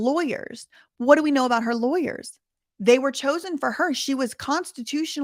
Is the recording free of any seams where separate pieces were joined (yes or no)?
yes